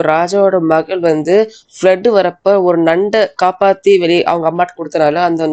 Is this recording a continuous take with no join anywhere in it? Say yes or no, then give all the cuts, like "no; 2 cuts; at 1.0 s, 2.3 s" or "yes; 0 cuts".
yes; 0 cuts